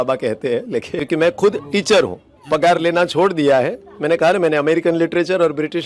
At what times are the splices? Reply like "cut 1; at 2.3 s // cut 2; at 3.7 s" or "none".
cut 1; at 0.9 s